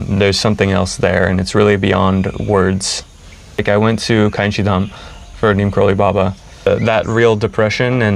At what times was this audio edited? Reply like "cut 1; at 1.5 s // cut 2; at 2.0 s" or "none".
cut 1; at 3.6 s // cut 2; at 6.7 s